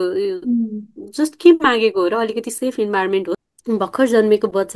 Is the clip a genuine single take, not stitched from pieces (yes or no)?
no